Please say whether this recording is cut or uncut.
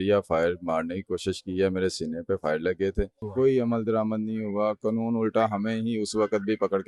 cut